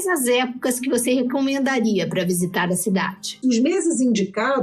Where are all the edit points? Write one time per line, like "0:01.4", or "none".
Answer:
0:03.4